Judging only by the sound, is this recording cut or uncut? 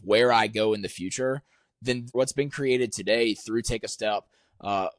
cut